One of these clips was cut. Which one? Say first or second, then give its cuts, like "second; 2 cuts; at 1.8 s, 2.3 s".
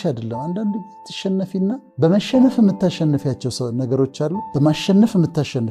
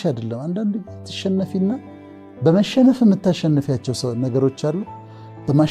first; 2 cuts; at 1.9 s, 4.4 s